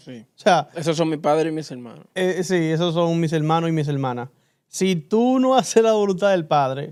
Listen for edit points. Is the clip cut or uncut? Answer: uncut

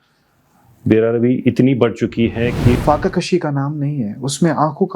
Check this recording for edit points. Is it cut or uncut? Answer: cut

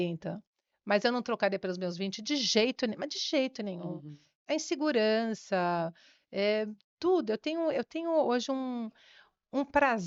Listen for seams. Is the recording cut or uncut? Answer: uncut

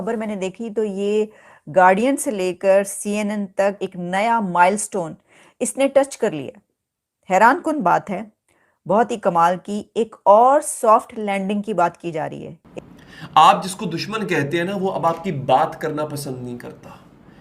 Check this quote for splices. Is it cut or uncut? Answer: cut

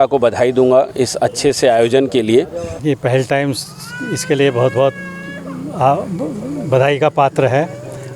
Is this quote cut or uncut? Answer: cut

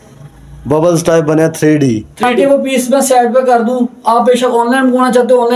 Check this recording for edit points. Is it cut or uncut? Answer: cut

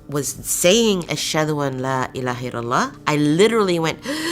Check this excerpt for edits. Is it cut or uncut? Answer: cut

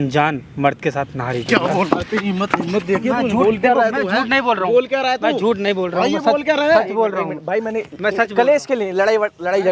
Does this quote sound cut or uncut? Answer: uncut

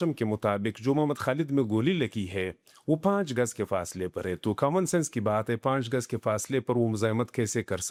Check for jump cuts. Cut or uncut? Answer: uncut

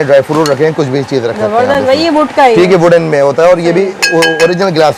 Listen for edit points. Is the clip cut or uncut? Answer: uncut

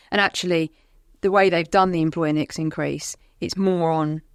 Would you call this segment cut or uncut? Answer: uncut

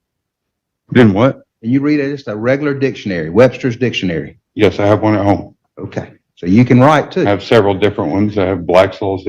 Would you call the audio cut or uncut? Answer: uncut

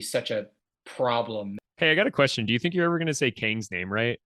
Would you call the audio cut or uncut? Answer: cut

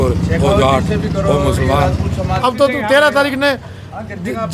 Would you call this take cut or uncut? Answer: cut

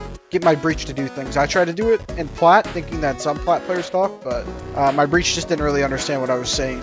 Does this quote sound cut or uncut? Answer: cut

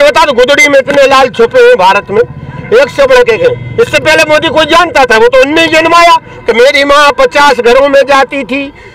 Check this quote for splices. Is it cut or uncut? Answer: uncut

